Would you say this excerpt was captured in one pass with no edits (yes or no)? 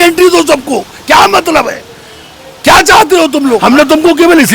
no